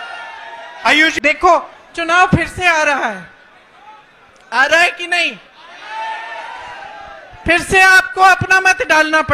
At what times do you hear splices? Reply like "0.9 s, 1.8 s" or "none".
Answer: 1.1 s